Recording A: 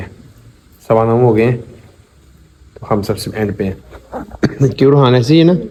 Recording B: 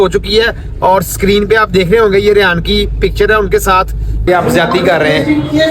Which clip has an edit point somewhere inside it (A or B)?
B